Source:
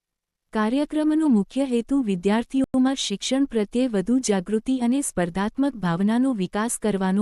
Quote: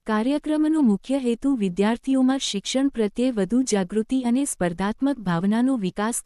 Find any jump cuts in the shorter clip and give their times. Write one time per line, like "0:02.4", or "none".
0:02.2